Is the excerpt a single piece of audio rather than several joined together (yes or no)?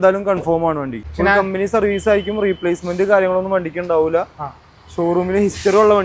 no